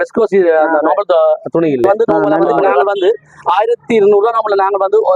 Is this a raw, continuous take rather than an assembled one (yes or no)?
no